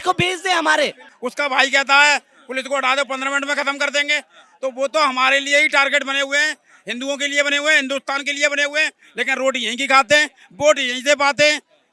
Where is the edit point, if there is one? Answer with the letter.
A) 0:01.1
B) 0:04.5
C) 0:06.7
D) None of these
A